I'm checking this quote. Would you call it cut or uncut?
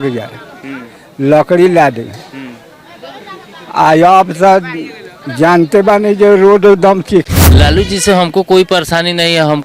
cut